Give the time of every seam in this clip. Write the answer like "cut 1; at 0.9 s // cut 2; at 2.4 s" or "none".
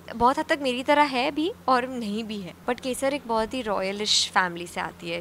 cut 1; at 2.5 s